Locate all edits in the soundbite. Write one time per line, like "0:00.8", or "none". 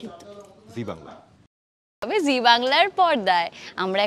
0:02.1